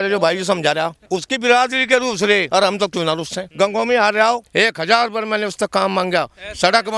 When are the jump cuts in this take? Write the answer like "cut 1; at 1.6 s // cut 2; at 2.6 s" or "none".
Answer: cut 1; at 1.0 s // cut 2; at 2.5 s // cut 3; at 3.4 s // cut 4; at 4.5 s